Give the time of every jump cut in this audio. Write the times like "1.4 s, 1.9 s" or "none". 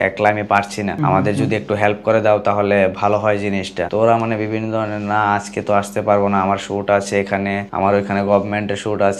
1.0 s, 3.8 s, 7.7 s